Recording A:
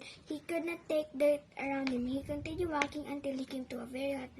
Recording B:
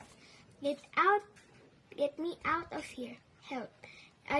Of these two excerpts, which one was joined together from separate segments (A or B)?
A